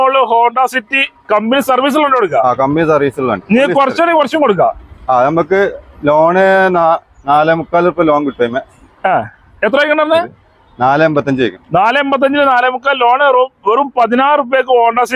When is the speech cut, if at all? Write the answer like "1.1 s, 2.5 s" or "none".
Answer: none